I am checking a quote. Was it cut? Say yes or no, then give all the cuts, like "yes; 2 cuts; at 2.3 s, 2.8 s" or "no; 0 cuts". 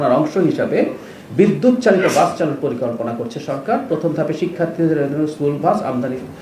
no; 0 cuts